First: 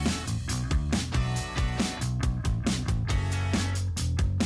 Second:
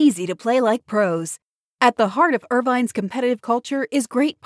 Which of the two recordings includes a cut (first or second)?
first